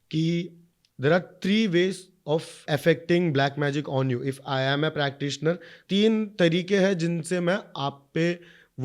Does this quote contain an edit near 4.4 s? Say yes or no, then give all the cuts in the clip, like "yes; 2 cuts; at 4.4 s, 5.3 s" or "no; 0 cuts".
no; 2 cuts; at 2.6 s, 5.7 s